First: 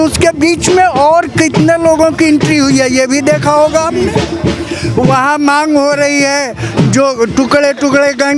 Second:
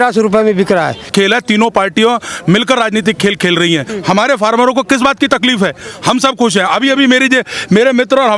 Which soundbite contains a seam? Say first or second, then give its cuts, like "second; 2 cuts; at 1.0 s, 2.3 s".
second; 3 cuts; at 1.1 s, 3.9 s, 5.9 s